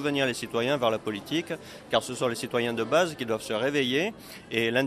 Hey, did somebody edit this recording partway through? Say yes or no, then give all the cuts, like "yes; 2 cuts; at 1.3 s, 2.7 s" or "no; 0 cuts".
no; 0 cuts